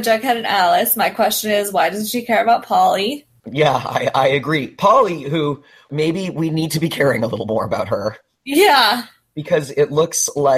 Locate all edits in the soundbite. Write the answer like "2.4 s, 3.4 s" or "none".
3.4 s, 5.9 s